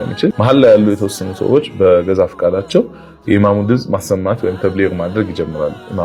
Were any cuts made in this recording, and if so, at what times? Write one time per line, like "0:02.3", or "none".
none